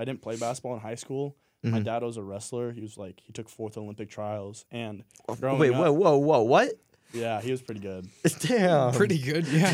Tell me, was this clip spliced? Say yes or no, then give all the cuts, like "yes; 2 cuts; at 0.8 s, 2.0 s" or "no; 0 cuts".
no; 0 cuts